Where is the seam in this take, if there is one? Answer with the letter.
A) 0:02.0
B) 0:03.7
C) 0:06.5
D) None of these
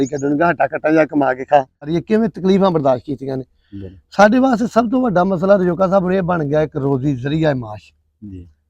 A